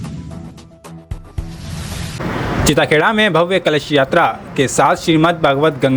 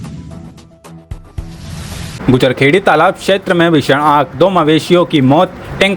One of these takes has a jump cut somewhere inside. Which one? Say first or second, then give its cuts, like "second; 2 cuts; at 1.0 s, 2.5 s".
second; 1 cut; at 2.2 s